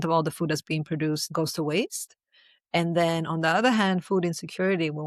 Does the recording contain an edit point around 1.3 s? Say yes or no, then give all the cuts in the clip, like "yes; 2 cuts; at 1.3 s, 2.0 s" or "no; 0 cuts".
yes; 1 cut; at 1.3 s